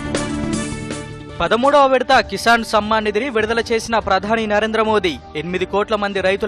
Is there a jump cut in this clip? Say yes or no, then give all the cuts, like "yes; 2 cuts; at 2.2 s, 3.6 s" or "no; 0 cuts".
yes; 1 cut; at 1.2 s